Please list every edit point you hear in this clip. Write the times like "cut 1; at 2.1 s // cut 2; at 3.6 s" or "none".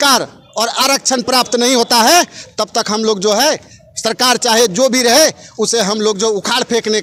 none